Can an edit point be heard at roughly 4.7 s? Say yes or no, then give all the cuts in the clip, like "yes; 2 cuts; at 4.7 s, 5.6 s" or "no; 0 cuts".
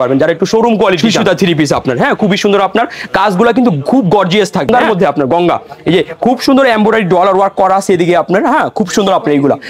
yes; 2 cuts; at 1.0 s, 4.7 s